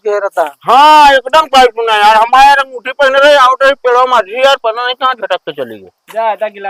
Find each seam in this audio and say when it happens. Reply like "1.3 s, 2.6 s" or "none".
none